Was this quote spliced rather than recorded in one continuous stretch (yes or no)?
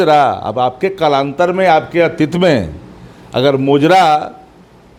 no